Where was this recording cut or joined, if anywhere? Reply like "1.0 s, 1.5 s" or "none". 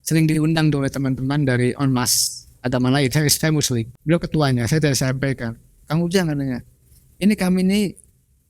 3.9 s